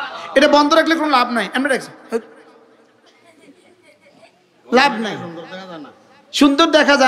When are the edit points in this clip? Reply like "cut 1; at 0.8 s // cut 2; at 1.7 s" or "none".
none